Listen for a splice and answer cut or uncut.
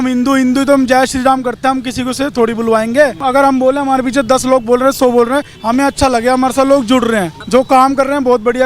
cut